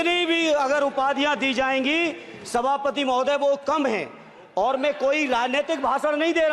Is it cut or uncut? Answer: uncut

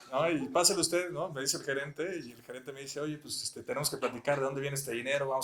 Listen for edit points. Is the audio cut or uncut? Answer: uncut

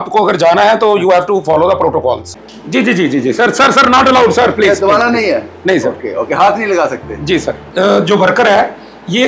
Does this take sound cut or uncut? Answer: cut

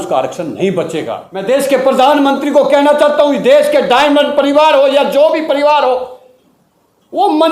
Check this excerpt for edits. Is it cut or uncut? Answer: cut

